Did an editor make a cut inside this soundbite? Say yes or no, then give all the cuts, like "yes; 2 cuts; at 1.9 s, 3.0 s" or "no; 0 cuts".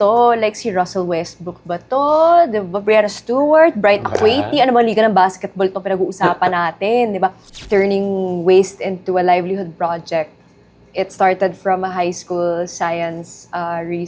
yes; 1 cut; at 7.5 s